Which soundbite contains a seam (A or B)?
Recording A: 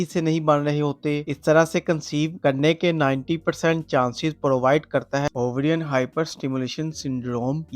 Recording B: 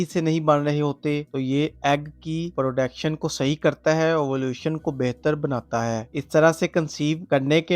A